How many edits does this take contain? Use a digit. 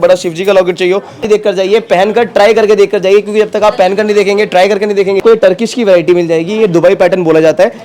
2